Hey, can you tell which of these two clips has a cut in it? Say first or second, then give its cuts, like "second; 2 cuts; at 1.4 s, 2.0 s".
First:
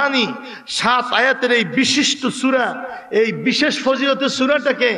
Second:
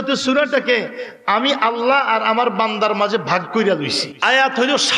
second; 1 cut; at 4.1 s